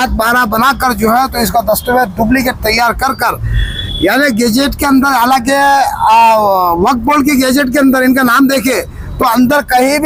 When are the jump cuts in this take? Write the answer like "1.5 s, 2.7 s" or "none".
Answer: none